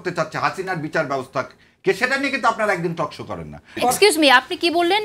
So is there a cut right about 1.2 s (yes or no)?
no